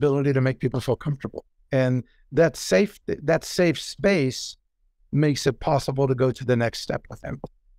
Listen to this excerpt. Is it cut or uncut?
uncut